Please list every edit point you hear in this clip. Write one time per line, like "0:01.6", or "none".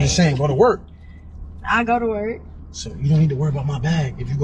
none